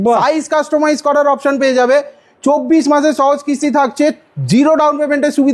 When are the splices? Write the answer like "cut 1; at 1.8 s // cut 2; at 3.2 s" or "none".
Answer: none